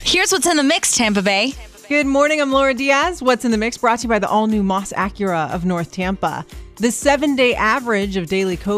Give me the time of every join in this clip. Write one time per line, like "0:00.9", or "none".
0:01.7